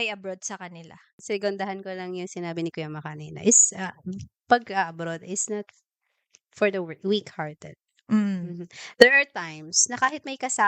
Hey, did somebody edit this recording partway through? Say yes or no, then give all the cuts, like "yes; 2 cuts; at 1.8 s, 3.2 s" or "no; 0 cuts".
yes; 1 cut; at 1.2 s